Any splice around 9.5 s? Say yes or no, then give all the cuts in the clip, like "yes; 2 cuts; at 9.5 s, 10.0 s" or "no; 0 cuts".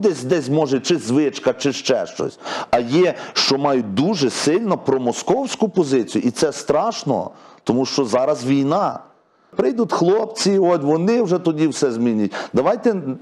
yes; 1 cut; at 9.5 s